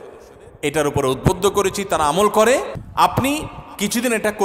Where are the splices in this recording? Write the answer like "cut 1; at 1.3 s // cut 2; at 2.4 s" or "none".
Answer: cut 1; at 2.8 s